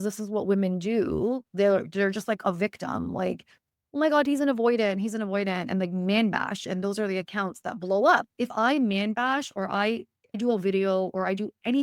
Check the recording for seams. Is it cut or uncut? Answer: cut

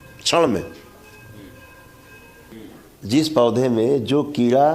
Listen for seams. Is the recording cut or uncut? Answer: cut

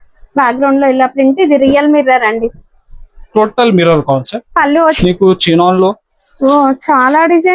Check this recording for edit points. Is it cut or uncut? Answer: cut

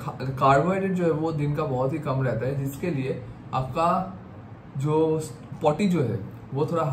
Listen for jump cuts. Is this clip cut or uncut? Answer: uncut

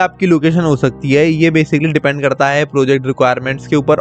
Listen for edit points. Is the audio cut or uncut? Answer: uncut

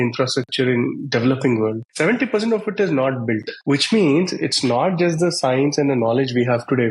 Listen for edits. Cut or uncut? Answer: cut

